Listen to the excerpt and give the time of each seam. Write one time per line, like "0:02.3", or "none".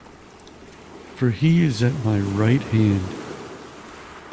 none